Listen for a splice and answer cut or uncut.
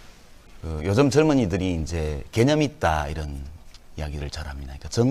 uncut